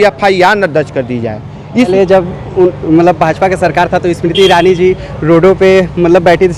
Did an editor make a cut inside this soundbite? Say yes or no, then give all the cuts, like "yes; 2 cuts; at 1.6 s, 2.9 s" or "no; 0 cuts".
yes; 1 cut; at 1.9 s